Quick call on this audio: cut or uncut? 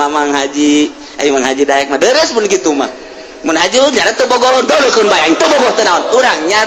uncut